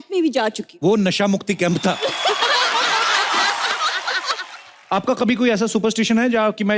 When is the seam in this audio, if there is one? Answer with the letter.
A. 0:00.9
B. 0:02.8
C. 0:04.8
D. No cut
C